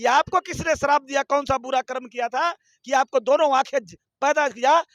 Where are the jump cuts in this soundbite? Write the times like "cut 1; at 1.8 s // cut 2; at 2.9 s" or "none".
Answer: none